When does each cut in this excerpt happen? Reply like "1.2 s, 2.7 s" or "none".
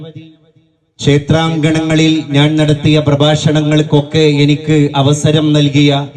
none